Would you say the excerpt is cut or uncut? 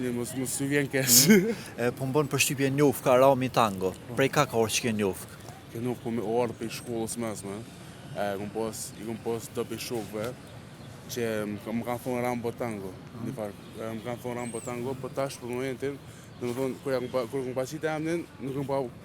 uncut